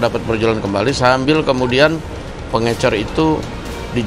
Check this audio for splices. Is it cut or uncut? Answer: uncut